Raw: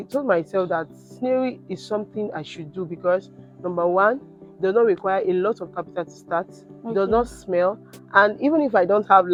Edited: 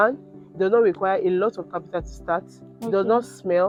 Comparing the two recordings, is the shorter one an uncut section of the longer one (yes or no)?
yes